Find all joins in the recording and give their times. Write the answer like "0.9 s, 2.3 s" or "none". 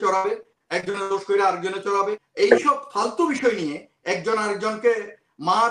2.2 s